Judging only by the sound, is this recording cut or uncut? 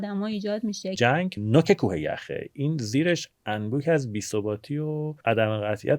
cut